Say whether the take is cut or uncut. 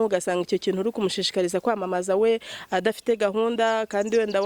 uncut